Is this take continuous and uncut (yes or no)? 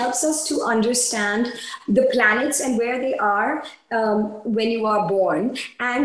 yes